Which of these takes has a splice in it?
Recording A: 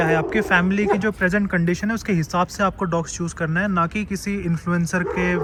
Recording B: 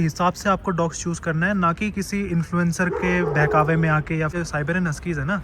B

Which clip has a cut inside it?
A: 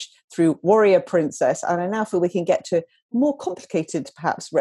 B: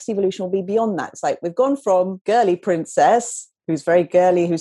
B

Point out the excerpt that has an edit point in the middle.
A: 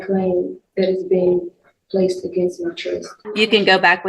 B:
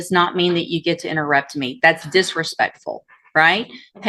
A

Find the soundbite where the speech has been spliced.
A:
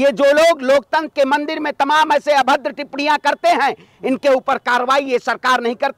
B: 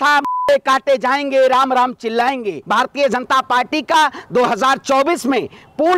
B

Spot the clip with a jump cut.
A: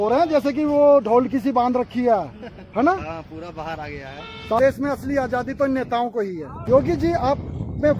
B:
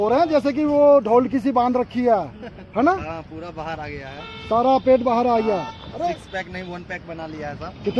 A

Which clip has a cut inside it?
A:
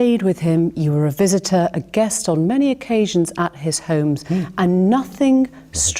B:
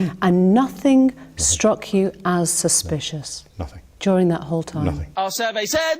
B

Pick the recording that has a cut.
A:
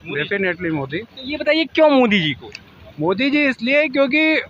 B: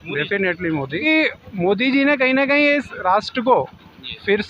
B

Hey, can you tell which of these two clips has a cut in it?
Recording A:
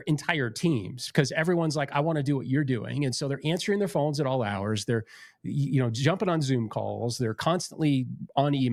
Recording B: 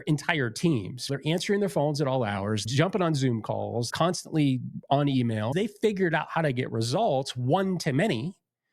B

